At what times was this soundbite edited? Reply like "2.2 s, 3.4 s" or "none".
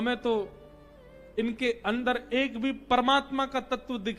none

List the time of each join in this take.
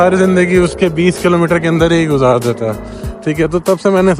none

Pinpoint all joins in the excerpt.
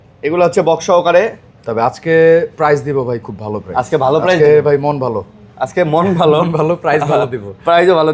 none

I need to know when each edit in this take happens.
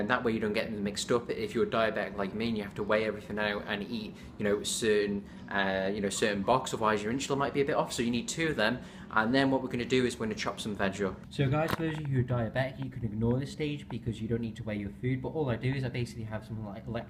5.5 s

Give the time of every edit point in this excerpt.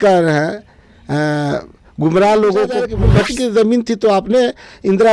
3.0 s

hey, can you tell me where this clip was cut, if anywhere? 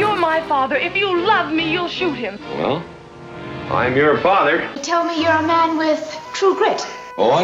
4.8 s

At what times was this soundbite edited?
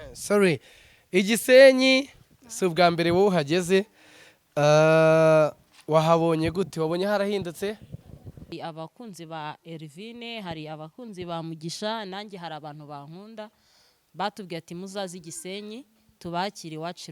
8.5 s

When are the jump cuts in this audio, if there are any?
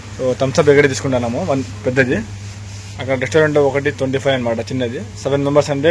none

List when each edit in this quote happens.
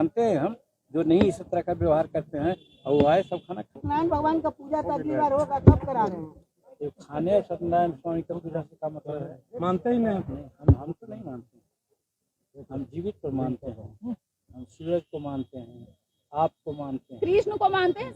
3.7 s

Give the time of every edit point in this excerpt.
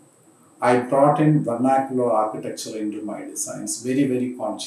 none

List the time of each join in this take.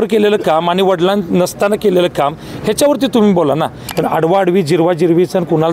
3.8 s

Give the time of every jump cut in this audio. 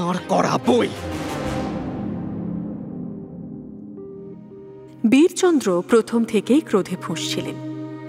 none

